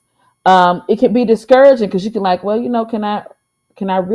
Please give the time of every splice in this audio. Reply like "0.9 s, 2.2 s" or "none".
none